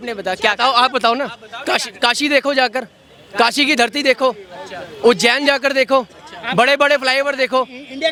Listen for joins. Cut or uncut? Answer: uncut